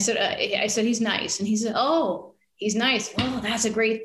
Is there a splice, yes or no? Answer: no